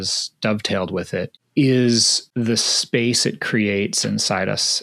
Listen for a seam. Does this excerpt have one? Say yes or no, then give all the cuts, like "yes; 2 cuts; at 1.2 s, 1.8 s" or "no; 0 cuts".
yes; 2 cuts; at 1.4 s, 2.2 s